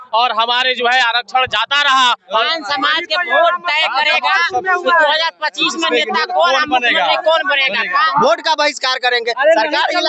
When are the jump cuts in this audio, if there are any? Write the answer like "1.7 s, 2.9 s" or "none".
2.4 s, 8.1 s